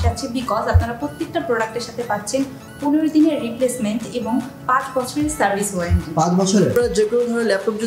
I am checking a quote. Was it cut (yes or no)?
yes